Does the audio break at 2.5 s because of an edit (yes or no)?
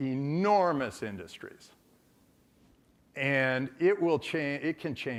no